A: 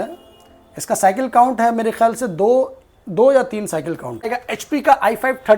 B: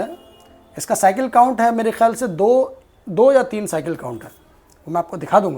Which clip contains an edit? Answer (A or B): A